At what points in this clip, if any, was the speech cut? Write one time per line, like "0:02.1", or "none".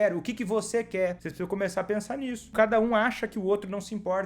0:01.2
0:02.5